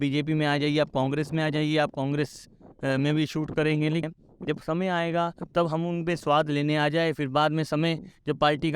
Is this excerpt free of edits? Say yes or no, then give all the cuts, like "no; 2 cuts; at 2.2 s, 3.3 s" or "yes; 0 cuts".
no; 1 cut; at 4.0 s